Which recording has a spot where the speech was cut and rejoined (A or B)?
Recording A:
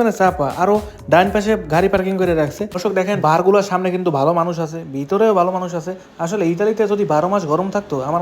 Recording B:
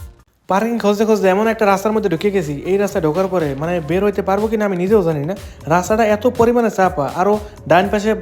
A